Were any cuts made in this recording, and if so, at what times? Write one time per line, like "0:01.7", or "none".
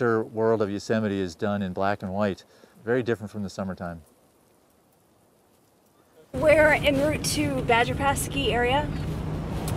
none